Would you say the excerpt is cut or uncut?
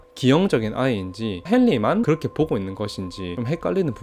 uncut